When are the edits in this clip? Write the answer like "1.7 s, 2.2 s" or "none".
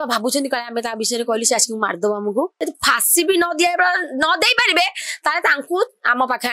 2.6 s